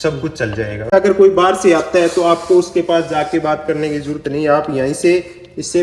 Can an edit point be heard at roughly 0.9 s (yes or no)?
yes